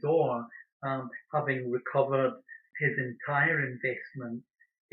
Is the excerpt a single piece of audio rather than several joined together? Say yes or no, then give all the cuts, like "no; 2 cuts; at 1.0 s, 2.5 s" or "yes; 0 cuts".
no; 1 cut; at 2.7 s